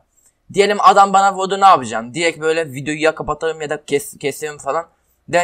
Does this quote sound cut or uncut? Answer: uncut